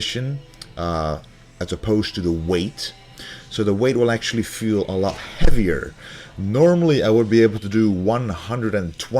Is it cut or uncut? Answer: cut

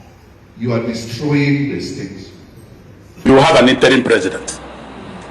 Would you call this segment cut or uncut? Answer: cut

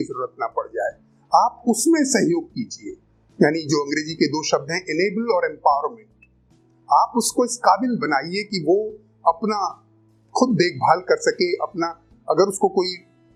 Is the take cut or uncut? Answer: uncut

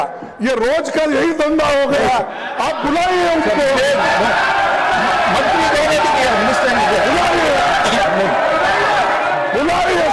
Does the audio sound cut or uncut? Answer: uncut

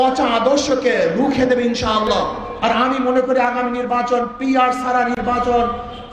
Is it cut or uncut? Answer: cut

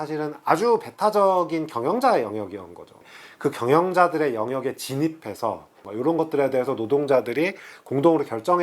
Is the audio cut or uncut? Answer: cut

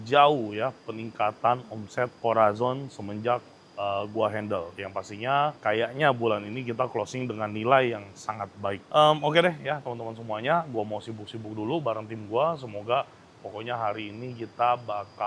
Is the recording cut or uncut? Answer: uncut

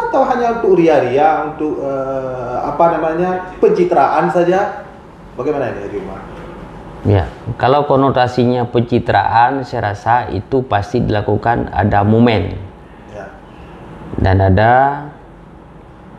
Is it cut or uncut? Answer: uncut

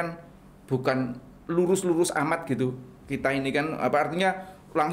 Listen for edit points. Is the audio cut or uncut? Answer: uncut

